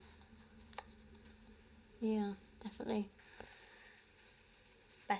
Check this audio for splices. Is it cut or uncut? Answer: cut